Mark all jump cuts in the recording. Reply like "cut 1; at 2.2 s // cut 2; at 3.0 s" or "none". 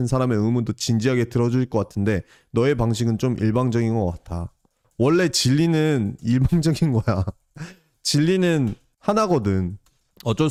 none